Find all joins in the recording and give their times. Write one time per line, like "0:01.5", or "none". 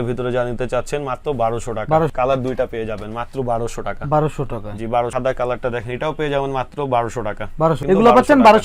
0:02.1
0:05.1
0:07.8